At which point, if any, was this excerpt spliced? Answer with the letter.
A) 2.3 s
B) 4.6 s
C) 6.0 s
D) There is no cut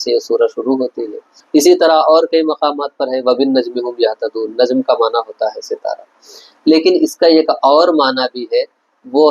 D